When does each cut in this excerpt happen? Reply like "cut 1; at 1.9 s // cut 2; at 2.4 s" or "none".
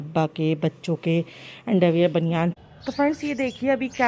cut 1; at 2.6 s